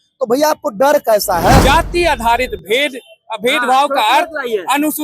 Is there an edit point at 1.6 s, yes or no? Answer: yes